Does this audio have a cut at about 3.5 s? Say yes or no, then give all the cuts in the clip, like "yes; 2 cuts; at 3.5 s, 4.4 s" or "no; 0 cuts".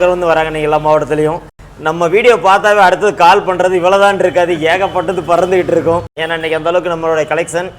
no; 1 cut; at 6.2 s